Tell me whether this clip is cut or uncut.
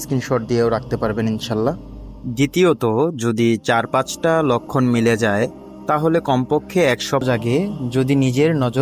cut